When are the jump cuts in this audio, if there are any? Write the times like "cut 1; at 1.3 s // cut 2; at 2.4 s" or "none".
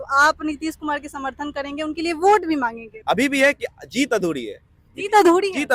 cut 1; at 2.9 s